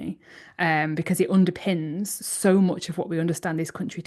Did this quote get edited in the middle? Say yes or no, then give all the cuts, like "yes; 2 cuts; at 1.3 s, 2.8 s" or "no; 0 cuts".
no; 0 cuts